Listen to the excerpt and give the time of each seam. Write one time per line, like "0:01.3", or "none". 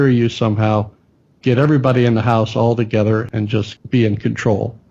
0:03.3

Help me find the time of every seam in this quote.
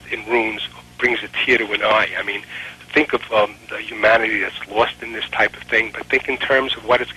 none

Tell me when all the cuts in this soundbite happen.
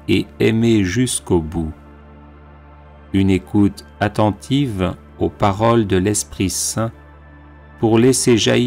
0:01.7
0:03.1

